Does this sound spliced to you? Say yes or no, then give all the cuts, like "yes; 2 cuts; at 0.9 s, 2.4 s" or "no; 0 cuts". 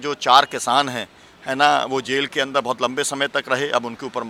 no; 0 cuts